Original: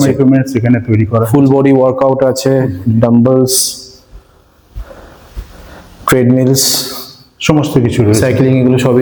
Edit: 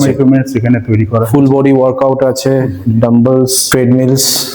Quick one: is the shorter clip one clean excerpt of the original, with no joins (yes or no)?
no